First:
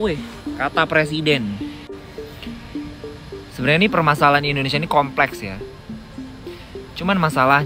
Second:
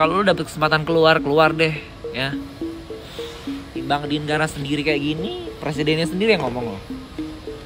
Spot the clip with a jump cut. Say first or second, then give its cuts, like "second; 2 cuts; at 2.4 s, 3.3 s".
first; 1 cut; at 1.6 s